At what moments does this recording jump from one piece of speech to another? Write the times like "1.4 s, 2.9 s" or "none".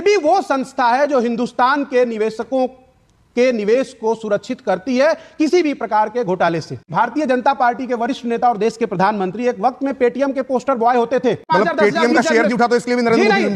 6.9 s, 11.4 s